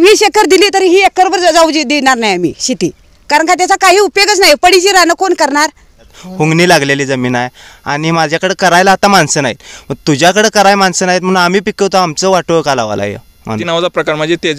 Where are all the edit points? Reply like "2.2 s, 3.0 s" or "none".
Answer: 6.2 s, 13.6 s